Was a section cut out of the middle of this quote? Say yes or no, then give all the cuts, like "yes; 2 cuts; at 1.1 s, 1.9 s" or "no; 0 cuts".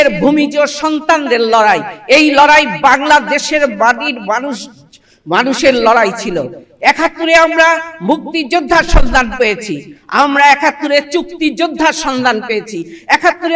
no; 0 cuts